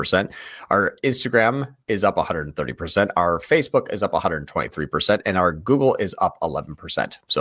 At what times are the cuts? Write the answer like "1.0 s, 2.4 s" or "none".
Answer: none